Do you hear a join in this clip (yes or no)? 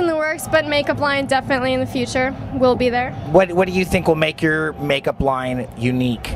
no